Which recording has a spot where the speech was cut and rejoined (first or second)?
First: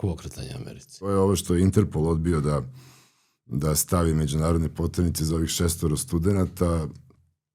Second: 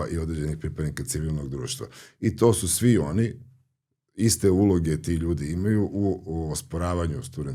first